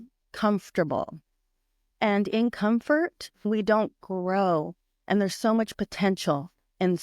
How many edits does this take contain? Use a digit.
1